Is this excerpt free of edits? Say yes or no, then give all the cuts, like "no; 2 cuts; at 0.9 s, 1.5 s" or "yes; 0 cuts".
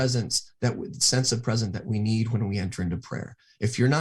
yes; 0 cuts